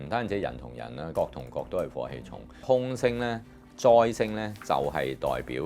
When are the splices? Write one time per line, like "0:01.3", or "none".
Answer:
0:01.1
0:02.6

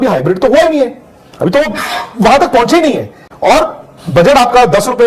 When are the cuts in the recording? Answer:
none

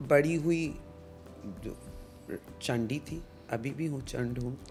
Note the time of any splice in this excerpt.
none

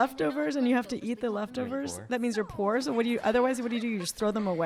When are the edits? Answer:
none

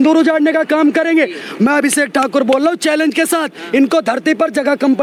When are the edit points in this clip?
none

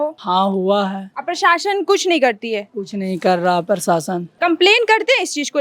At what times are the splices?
none

